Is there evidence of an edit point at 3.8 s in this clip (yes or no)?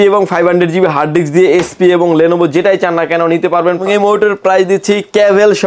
yes